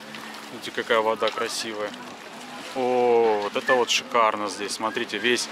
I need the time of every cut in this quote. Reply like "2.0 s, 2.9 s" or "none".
2.7 s

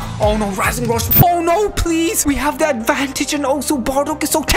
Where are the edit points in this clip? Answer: 1.1 s

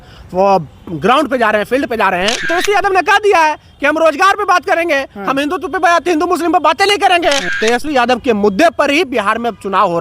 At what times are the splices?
2.4 s, 7.5 s

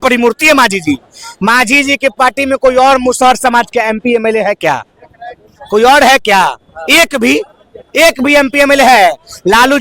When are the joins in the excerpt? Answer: none

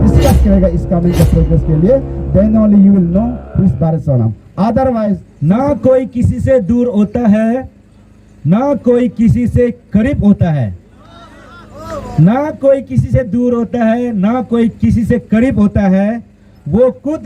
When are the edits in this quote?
5.3 s

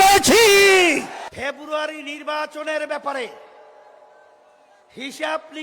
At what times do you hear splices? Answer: 1.2 s

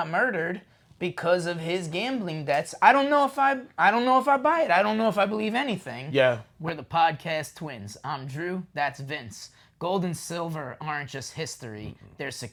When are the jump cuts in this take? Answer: none

